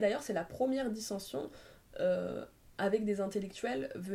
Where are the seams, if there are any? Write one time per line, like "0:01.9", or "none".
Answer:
none

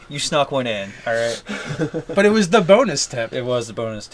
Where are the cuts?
0:01.0

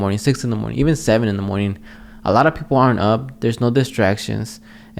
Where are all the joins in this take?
none

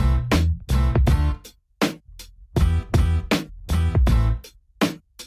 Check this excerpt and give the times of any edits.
none

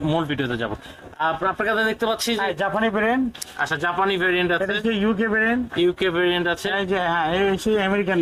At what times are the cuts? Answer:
none

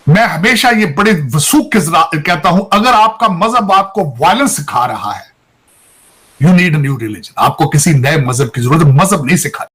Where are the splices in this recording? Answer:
none

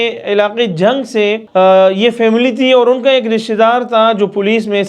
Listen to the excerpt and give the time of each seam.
0:01.4

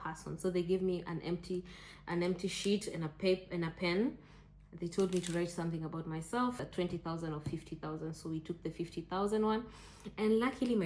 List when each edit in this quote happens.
0:06.6

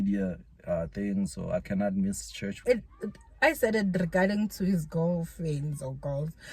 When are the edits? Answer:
0:02.5

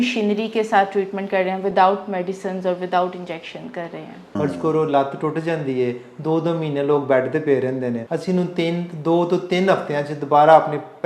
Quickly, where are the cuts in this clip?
0:04.2
0:08.0

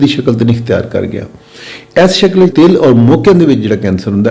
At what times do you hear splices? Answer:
0:02.5

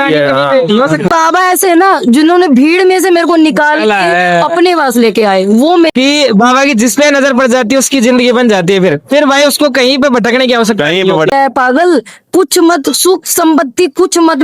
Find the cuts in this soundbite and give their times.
0:01.1
0:05.9
0:11.3

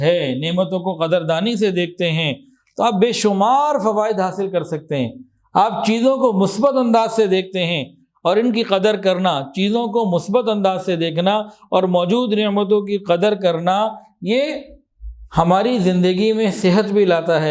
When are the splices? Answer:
none

